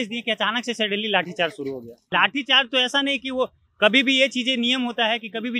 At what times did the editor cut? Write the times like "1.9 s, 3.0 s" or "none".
2.0 s